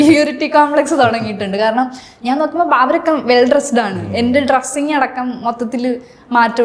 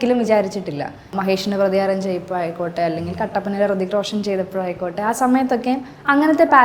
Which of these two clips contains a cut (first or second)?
second